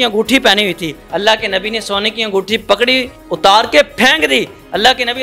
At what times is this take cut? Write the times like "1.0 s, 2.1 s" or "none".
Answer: 0.9 s, 3.2 s